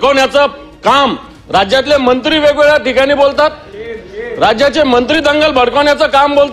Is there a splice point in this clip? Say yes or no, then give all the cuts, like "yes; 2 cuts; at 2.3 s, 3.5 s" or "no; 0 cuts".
no; 0 cuts